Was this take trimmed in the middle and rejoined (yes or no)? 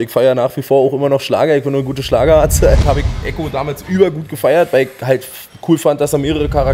yes